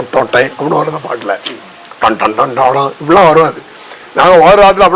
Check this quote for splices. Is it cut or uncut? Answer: uncut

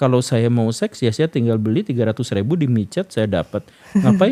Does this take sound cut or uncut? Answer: uncut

